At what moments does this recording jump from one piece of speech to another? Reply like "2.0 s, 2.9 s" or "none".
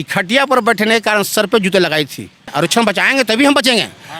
2.5 s